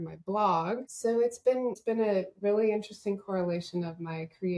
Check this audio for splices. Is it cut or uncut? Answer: cut